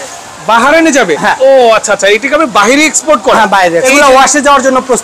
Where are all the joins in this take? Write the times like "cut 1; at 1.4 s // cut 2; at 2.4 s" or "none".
cut 1; at 3.8 s

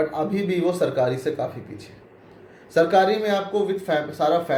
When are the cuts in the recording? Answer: none

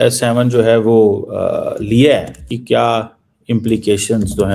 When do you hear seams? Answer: cut 1; at 2.5 s

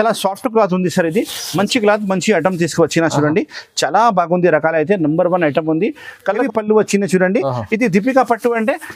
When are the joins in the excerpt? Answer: cut 1; at 6.4 s

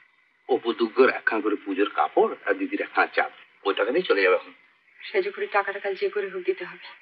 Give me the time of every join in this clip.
none

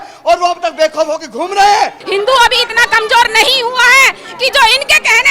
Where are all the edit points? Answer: cut 1; at 2.0 s

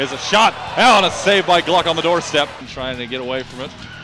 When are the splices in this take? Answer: cut 1; at 2.7 s

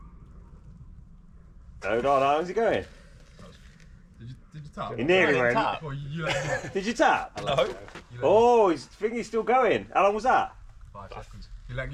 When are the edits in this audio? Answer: none

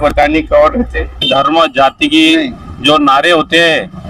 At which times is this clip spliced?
cut 1; at 1.2 s

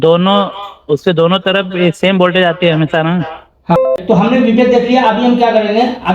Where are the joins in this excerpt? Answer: cut 1; at 3.8 s

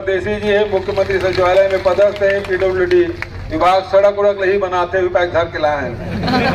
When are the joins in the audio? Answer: none

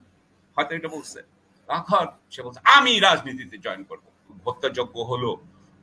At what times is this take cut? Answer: cut 1; at 4.4 s

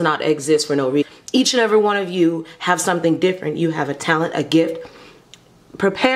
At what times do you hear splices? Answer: cut 1; at 1.1 s

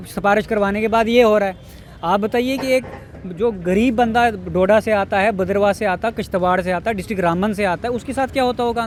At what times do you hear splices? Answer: none

